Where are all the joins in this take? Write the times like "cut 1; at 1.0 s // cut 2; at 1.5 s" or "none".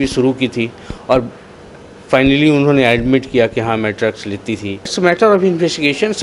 cut 1; at 4.9 s